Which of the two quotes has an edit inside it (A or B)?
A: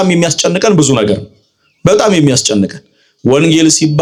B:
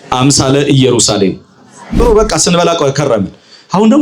B